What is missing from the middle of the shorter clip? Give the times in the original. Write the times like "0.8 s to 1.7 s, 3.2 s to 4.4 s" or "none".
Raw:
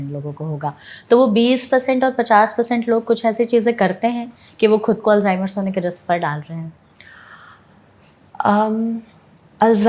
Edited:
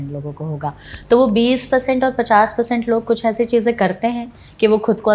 none